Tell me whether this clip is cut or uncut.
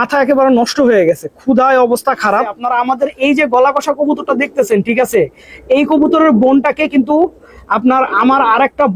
cut